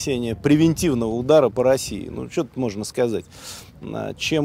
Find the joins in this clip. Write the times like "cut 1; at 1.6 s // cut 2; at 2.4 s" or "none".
none

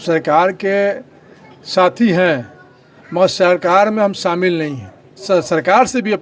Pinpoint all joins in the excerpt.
cut 1; at 5.2 s

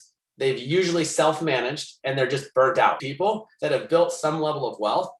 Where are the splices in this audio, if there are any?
cut 1; at 3.0 s

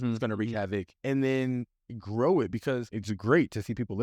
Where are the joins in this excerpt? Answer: cut 1; at 0.9 s // cut 2; at 2.9 s

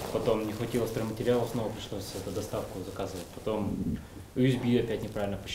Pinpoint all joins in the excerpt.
none

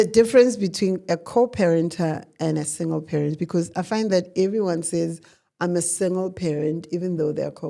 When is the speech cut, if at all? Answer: none

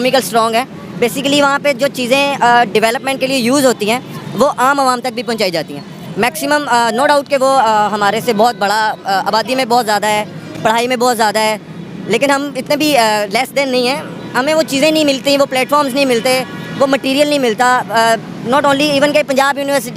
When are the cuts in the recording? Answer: none

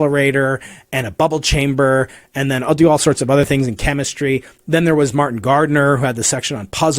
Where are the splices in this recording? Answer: none

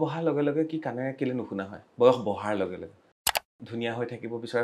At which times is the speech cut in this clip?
cut 1; at 3.2 s

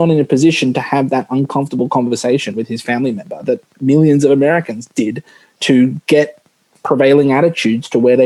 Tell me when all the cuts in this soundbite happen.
none

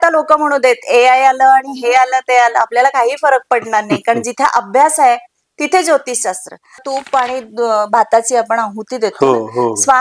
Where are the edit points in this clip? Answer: cut 1; at 6.9 s

